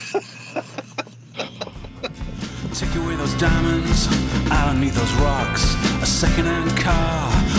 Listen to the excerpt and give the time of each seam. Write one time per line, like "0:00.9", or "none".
0:02.4